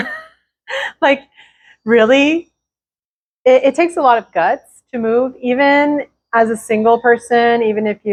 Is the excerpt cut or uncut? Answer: uncut